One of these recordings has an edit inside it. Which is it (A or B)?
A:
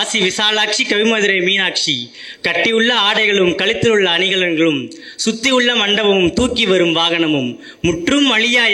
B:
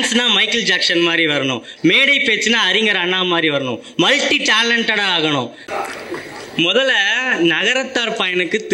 B